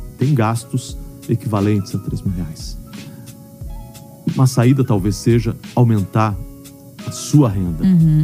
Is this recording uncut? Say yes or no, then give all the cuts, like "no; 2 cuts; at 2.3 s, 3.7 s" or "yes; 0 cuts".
yes; 0 cuts